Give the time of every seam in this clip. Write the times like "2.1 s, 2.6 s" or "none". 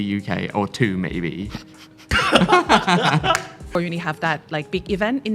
2.2 s, 3.7 s